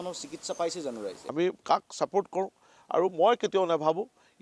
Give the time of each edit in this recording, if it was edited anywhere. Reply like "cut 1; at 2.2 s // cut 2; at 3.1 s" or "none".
cut 1; at 1.2 s